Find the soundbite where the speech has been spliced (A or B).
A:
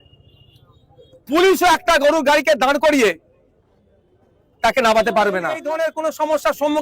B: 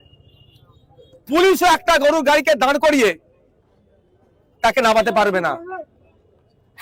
A